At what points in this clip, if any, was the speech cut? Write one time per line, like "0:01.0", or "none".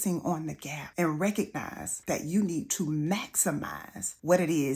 none